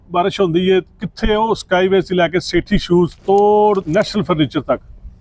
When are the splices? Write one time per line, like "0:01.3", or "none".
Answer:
0:03.2
0:03.9